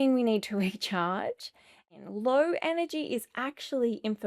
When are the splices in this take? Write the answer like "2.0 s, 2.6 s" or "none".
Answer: 1.8 s